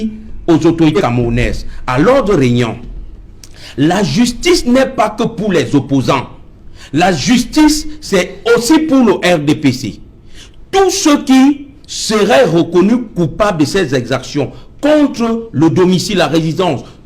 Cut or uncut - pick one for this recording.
cut